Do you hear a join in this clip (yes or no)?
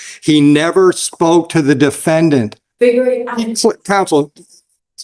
yes